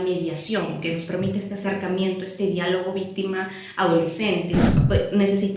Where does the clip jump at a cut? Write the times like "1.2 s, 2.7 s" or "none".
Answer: 4.6 s